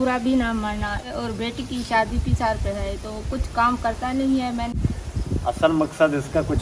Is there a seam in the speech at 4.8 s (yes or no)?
yes